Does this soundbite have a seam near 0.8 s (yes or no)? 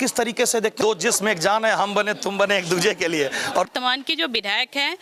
yes